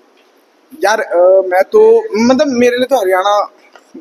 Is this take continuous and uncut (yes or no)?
yes